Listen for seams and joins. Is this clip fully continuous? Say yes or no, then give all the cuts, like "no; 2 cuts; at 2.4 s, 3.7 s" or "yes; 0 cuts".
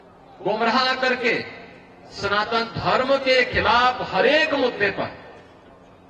yes; 0 cuts